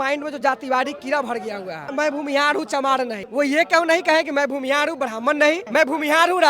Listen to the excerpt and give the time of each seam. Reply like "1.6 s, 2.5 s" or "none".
1.9 s, 3.2 s, 5.6 s